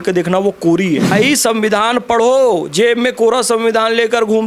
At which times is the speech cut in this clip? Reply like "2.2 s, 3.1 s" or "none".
1.1 s